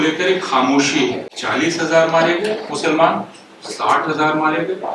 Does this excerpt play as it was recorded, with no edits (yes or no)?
no